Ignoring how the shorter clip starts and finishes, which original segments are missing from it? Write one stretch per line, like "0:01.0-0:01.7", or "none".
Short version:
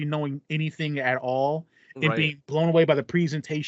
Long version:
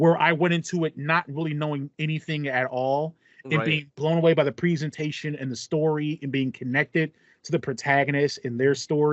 none